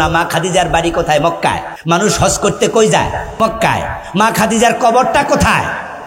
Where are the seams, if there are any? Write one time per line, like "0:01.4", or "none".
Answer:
0:01.7
0:03.3

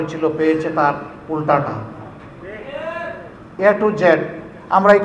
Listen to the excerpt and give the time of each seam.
0:03.5

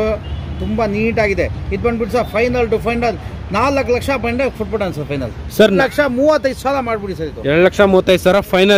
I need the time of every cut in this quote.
0:05.8

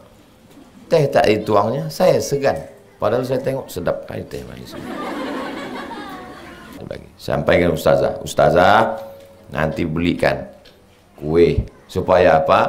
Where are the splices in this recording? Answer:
0:06.8

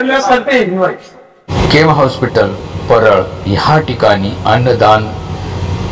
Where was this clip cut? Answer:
0:01.5

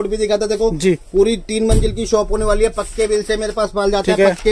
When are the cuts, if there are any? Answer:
none

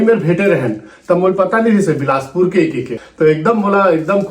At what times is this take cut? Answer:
0:03.0

